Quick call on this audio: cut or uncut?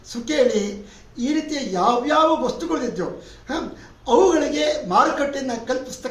uncut